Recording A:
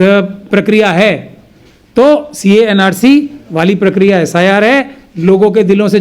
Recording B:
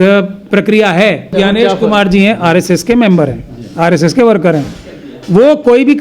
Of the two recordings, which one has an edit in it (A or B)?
B